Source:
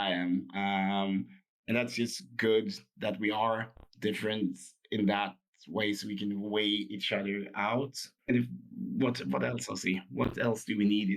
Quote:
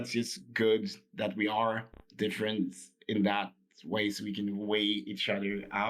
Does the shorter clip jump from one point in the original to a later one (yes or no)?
no